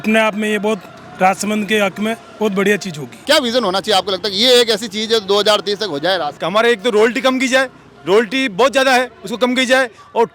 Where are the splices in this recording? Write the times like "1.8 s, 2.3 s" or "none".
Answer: 3.1 s, 6.4 s